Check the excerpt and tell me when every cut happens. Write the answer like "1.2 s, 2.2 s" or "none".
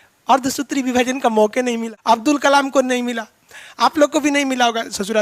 1.9 s